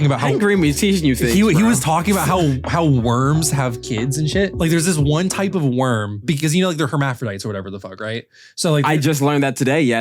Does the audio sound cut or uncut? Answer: cut